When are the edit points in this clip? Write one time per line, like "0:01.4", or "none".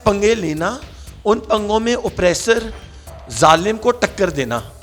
none